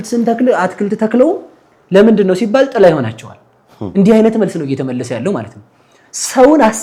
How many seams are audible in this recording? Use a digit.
0